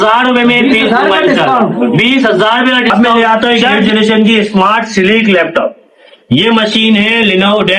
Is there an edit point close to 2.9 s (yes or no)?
yes